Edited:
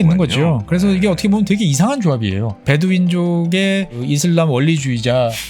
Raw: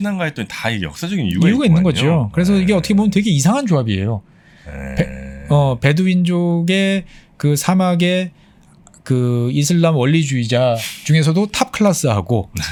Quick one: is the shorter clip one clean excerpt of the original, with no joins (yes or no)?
no